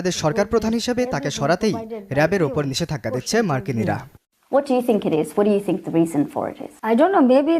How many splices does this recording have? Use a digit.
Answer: 1